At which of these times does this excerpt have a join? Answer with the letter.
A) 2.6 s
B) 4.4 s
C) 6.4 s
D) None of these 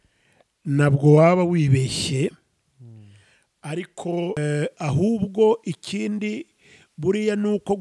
B